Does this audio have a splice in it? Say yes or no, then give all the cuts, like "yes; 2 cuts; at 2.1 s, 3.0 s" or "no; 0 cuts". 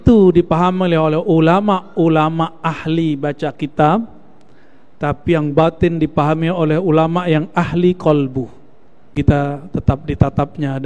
yes; 1 cut; at 9.1 s